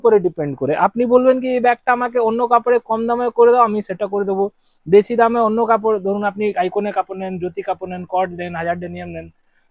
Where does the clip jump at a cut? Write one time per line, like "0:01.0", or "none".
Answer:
none